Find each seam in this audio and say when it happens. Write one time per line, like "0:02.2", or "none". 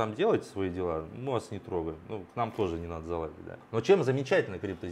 0:03.5